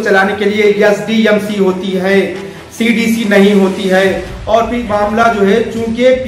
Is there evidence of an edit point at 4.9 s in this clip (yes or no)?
yes